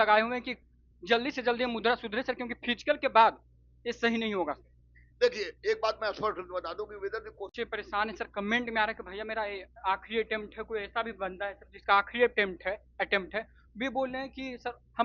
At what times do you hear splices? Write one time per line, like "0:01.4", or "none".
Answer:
0:07.5